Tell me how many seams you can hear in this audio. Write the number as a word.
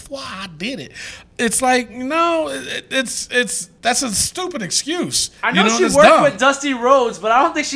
two